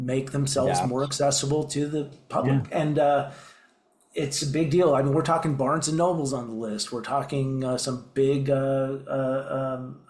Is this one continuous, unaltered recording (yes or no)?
yes